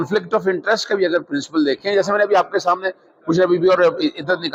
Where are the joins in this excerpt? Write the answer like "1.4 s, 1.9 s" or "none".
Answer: none